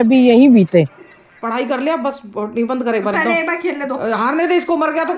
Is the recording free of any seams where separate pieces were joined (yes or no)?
no